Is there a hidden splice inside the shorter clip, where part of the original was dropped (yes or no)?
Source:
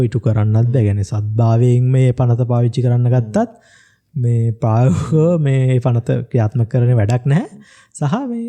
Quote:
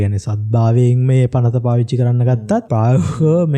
yes